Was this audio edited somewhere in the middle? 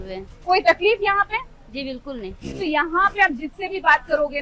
no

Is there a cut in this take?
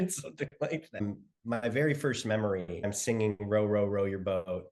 yes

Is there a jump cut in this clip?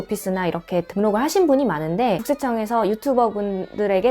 yes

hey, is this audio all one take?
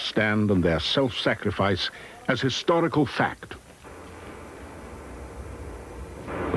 yes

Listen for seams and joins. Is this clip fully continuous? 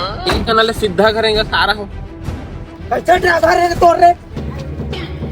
no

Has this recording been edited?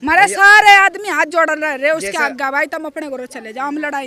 no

